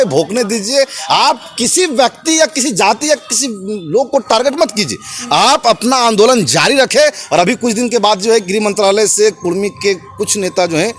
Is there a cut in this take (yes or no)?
no